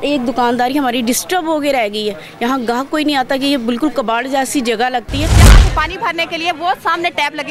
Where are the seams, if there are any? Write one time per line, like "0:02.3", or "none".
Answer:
0:05.4